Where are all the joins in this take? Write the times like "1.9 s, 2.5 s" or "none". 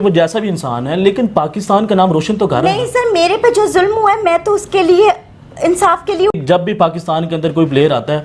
6.3 s